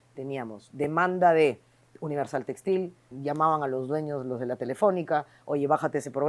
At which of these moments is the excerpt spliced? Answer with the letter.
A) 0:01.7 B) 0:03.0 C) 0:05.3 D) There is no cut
B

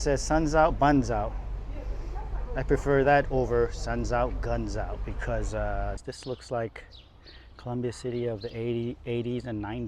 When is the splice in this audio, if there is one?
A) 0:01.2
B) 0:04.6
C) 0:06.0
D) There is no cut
C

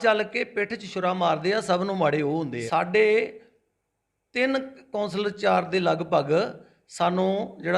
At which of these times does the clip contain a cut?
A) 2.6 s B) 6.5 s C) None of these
A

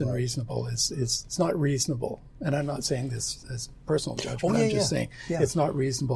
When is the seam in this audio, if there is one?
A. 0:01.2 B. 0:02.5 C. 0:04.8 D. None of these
A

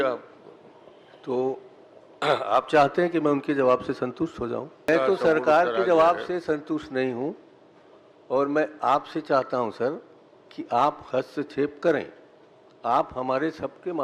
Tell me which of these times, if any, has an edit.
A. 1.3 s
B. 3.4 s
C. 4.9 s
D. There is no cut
C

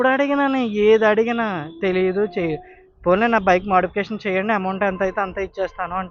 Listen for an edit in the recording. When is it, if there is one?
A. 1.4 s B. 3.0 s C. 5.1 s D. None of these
D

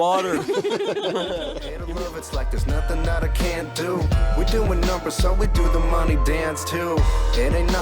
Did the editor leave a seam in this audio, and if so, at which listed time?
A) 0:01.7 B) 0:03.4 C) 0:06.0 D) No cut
A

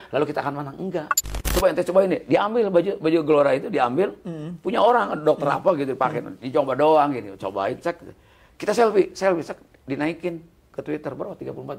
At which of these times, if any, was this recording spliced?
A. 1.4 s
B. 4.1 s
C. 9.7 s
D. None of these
A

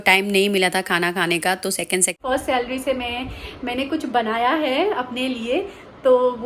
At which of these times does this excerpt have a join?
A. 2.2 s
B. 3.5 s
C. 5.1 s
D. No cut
A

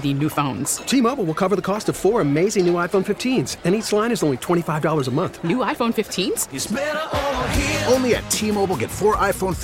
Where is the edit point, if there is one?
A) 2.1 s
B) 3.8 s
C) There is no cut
C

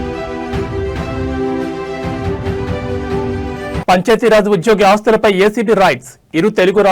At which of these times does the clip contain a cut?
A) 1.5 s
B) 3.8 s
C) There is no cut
B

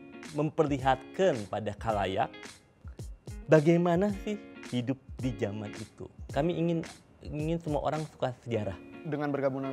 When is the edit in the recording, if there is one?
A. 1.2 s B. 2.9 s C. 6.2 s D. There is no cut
C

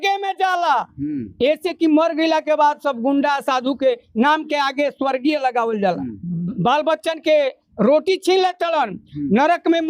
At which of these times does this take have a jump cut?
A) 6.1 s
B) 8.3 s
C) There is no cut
A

